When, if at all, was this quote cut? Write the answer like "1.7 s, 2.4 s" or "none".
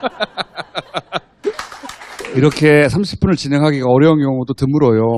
1.3 s

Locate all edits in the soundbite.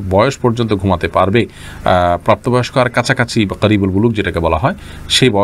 none

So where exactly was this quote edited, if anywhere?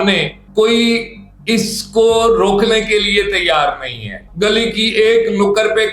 4.2 s

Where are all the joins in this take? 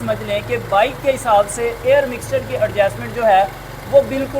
none

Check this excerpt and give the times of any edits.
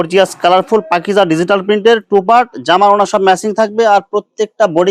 none

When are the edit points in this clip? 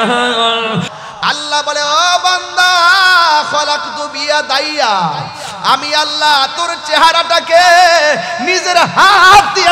0.9 s

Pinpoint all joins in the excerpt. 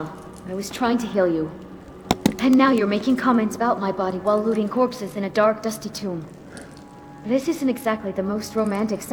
none

